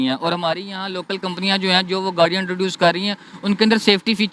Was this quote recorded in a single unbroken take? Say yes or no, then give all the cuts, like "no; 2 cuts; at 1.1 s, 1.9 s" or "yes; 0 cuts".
yes; 0 cuts